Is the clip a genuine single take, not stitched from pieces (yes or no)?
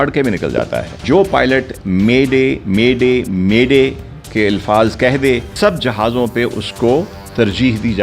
no